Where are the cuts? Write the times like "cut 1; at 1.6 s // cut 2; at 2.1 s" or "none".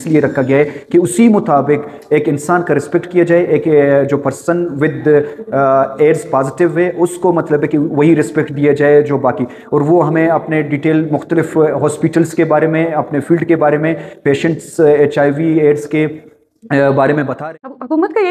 cut 1; at 17.3 s